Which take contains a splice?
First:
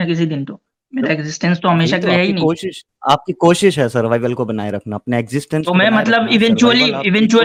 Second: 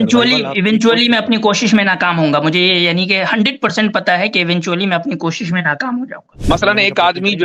second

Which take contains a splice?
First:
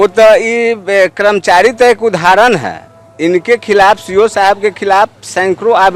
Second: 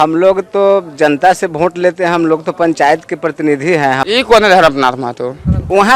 second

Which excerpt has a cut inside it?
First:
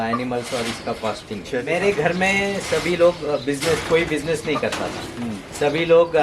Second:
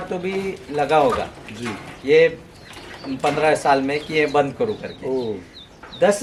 first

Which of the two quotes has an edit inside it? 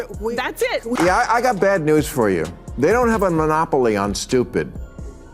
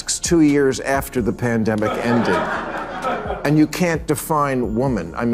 first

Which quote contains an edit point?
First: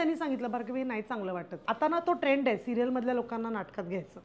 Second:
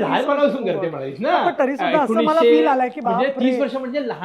first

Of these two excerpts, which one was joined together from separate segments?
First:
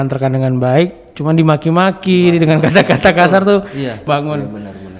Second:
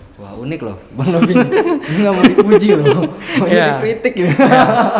first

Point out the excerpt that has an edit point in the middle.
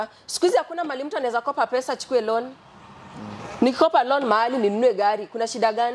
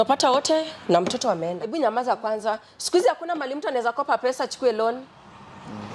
second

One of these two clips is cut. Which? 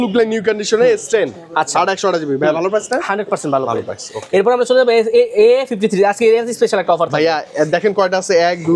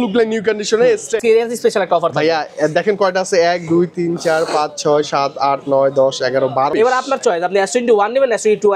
second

